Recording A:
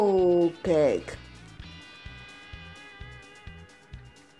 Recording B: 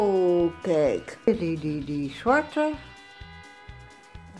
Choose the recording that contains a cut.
B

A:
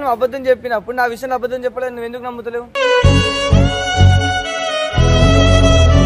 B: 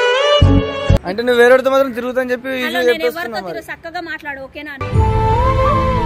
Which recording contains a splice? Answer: B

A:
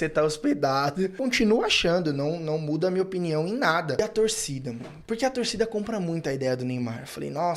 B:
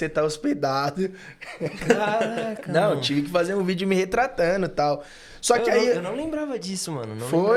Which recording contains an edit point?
A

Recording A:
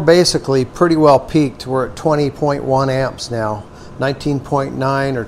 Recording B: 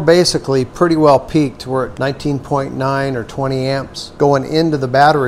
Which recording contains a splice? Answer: B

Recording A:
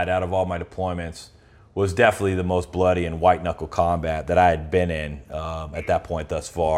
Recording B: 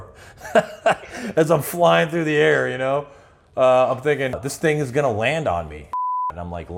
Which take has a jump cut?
B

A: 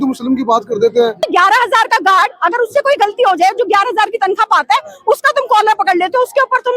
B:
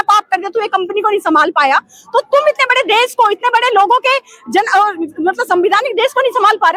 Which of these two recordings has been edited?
A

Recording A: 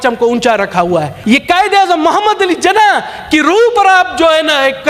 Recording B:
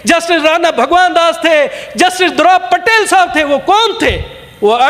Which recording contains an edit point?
A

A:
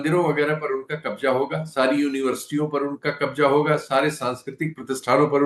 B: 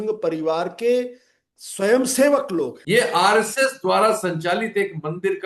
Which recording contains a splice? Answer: B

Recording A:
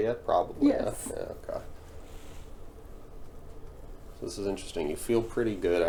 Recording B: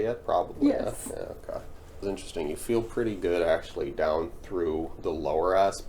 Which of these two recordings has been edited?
B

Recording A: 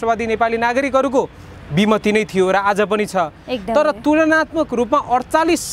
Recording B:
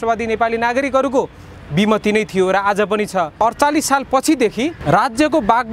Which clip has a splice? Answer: B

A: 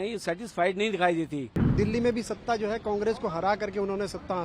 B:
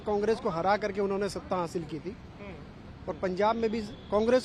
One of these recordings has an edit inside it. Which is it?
A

